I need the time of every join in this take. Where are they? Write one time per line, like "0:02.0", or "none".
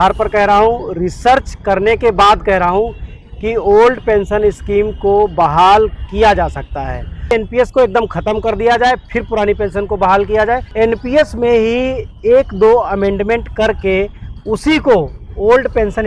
0:07.3
0:10.7